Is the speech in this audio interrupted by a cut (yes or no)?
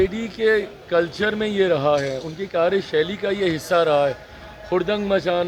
no